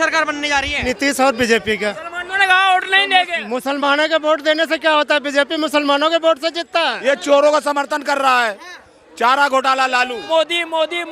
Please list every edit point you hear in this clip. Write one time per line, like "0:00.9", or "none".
0:00.9
0:02.0
0:07.0
0:10.2

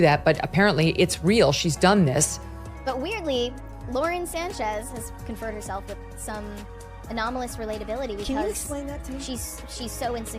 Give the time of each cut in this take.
0:02.8

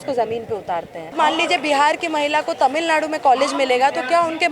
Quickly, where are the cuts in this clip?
0:01.2

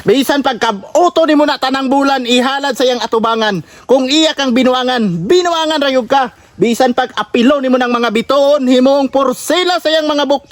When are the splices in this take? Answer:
none

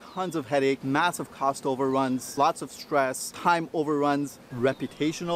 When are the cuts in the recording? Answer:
0:00.8
0:02.3
0:03.3
0:04.4

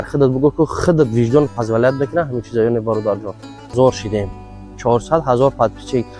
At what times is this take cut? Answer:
0:03.7

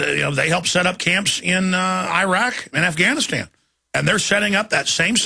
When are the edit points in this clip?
0:03.3

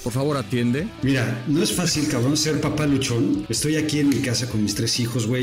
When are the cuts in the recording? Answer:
0:00.9
0:03.5

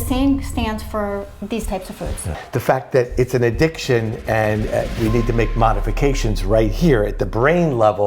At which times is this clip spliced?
0:02.3

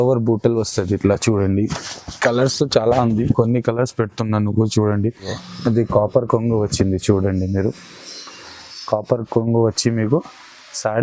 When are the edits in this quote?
0:05.4

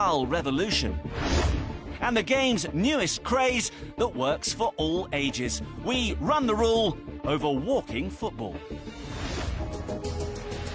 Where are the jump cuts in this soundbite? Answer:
0:01.2

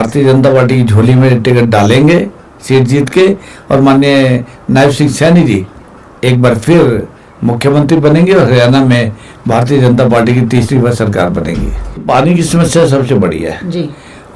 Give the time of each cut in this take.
0:12.0

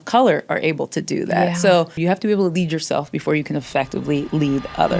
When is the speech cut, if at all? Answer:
0:01.9

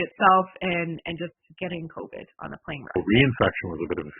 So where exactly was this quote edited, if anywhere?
0:01.4
0:03.0

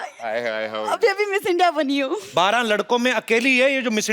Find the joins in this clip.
0:02.2

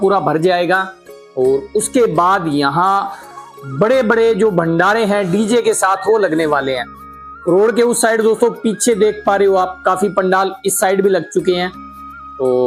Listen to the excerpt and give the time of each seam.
none

